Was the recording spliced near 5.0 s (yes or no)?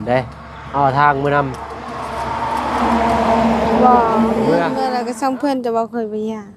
yes